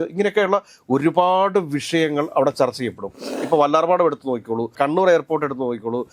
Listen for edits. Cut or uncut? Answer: cut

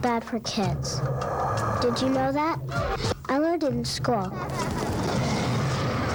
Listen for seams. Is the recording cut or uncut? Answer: uncut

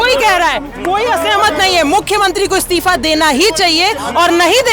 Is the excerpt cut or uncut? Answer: uncut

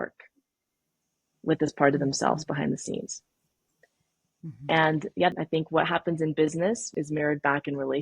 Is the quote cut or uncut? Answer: cut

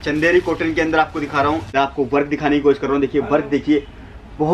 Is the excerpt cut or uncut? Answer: cut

